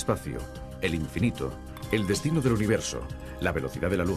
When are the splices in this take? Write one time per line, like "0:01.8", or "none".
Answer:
0:02.2